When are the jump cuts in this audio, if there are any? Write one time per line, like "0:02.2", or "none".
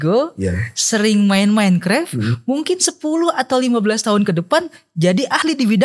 none